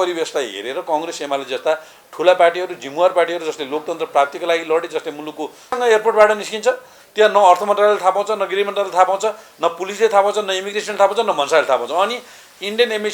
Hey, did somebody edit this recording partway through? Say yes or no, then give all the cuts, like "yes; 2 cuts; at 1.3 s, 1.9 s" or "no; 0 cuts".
yes; 1 cut; at 5.8 s